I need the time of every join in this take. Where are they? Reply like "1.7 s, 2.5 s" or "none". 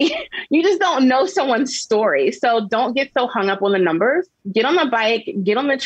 4.4 s